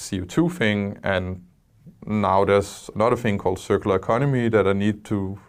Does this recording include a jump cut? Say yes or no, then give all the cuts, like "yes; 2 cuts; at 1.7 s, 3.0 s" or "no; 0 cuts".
no; 0 cuts